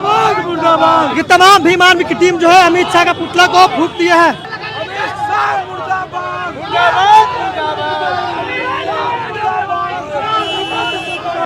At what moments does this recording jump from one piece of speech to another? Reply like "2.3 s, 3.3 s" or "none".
none